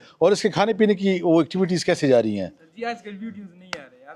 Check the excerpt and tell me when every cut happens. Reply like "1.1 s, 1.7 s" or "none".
none